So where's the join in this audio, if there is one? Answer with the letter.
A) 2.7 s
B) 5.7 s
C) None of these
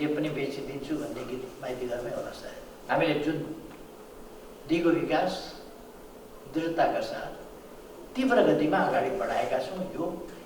A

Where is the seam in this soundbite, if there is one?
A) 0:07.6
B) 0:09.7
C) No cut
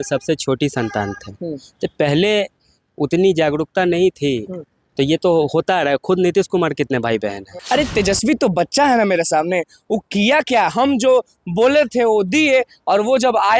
A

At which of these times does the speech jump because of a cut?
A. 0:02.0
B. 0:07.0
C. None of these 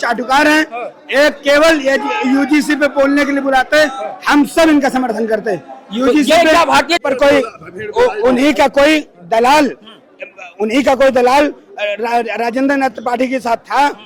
B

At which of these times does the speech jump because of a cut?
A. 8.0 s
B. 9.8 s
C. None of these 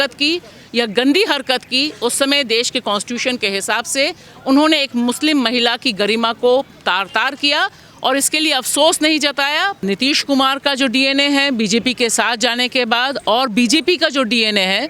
B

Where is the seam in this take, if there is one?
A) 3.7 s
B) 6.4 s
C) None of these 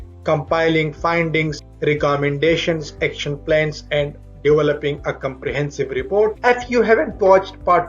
B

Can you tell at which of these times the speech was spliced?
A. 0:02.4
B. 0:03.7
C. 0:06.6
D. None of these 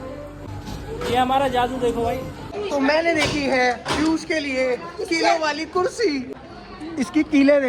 D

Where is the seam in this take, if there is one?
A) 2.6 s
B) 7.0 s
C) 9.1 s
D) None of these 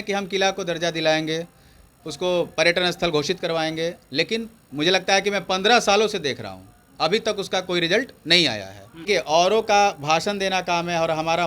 C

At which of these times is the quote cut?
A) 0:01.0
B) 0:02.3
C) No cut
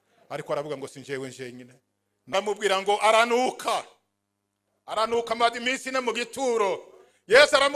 B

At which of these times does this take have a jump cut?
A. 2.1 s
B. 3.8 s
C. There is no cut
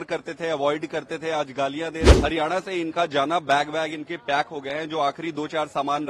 A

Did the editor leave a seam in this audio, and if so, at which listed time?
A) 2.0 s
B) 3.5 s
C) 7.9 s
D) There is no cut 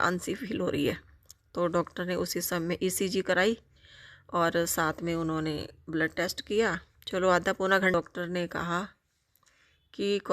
C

